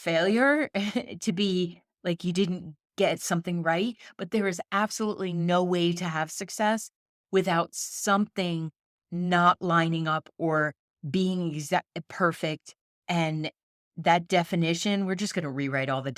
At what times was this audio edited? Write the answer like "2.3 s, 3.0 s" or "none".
none